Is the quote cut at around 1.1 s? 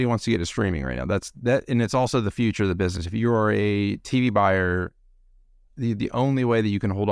no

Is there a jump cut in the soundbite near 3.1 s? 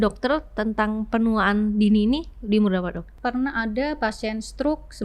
yes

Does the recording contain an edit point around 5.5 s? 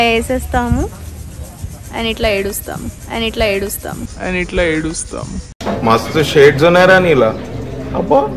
no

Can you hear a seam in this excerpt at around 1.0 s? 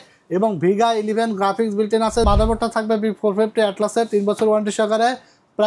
no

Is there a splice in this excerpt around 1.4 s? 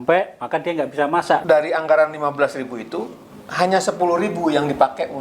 yes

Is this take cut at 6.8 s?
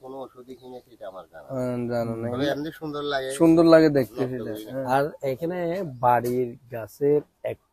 no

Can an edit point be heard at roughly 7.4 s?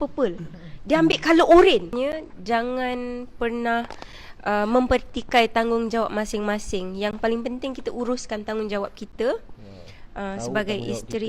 no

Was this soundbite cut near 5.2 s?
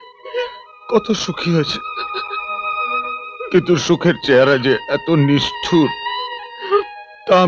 no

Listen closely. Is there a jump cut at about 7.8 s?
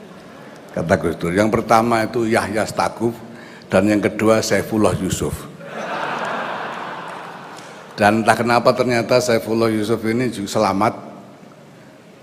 yes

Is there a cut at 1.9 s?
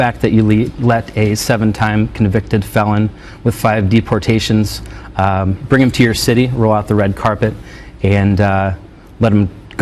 yes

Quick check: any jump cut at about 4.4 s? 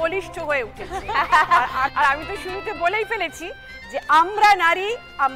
no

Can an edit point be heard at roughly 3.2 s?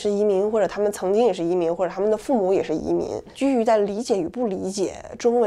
yes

